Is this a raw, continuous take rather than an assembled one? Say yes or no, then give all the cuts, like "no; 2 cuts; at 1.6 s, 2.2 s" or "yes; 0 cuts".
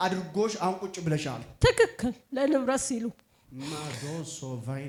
yes; 0 cuts